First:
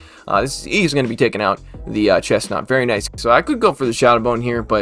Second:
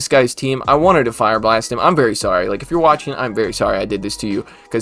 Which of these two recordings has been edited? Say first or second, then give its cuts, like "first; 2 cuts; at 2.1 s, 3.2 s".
first; 1 cut; at 3.1 s